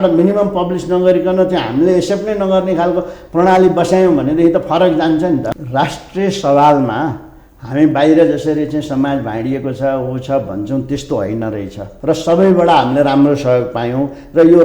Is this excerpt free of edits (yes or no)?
no